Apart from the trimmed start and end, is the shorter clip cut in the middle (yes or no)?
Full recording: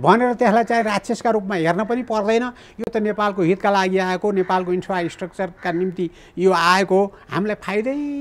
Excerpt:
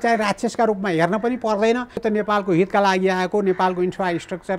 yes